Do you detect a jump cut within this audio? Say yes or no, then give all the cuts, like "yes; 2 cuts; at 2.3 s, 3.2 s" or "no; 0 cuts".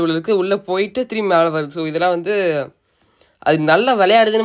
no; 0 cuts